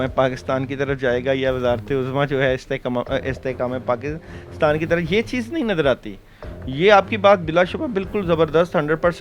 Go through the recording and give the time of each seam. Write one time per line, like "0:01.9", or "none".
none

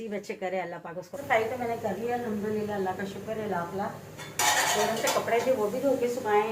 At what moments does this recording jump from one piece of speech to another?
0:01.1

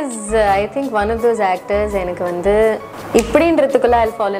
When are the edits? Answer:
0:02.9

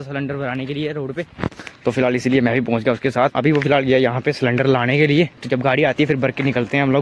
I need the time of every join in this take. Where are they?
none

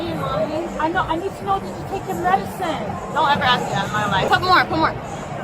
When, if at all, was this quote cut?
0:04.3

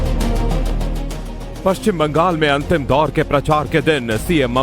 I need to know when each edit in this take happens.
0:02.1

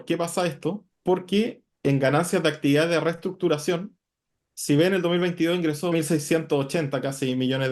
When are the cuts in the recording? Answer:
0:00.9
0:01.6
0:05.9

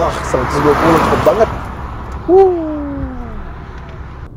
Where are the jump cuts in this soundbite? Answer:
none

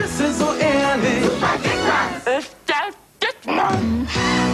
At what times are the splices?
none

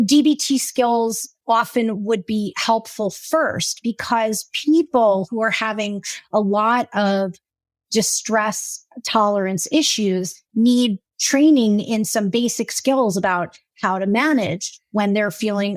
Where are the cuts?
0:01.3

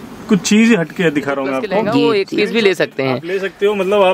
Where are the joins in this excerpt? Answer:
0:01.9

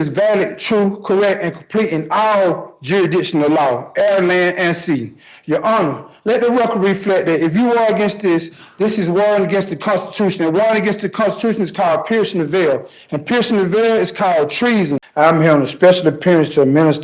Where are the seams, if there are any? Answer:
0:14.6

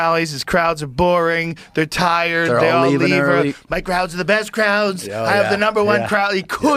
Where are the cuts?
none

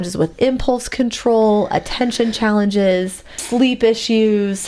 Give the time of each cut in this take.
0:03.4

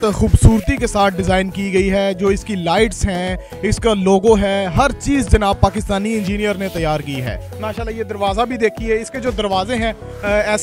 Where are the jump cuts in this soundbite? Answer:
none

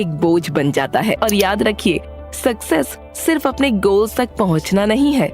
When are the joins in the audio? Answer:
0:01.2

